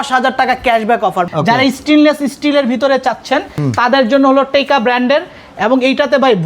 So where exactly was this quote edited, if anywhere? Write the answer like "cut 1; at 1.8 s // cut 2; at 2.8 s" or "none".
cut 1; at 1.3 s // cut 2; at 3.5 s